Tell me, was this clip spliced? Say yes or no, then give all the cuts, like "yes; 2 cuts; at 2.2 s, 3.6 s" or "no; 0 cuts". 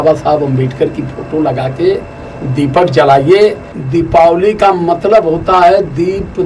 yes; 1 cut; at 3.7 s